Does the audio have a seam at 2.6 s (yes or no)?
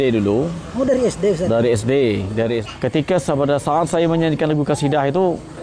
yes